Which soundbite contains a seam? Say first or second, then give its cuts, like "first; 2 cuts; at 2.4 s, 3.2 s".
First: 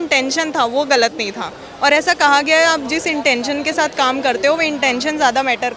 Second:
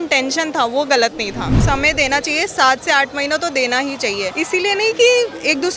second; 2 cuts; at 1.6 s, 4.3 s